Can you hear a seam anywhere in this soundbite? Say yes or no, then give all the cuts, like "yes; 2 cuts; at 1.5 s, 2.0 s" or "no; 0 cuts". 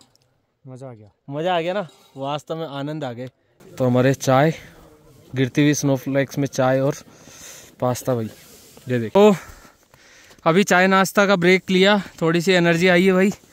yes; 2 cuts; at 3.5 s, 9.1 s